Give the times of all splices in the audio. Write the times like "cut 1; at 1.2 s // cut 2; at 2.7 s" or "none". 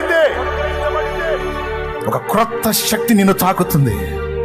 none